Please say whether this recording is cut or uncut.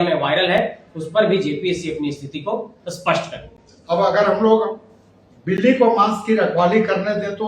cut